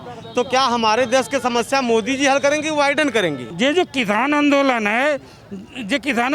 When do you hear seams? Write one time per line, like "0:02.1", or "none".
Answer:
0:03.4